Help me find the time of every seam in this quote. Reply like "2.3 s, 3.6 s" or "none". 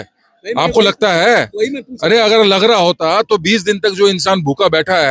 none